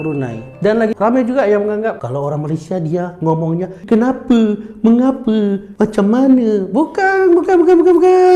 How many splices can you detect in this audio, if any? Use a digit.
1